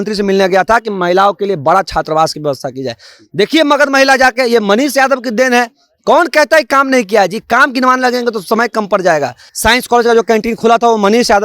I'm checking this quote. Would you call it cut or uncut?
cut